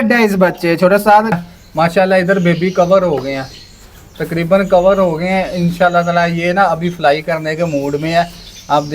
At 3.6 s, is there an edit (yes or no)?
no